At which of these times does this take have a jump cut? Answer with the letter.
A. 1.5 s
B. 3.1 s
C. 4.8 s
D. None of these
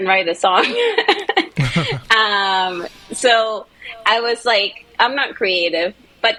D